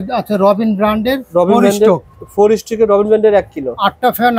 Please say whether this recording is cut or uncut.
uncut